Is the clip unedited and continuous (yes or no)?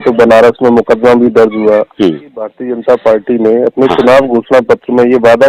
no